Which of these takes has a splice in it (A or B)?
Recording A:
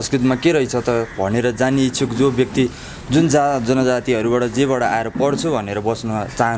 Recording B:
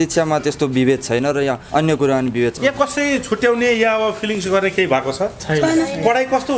B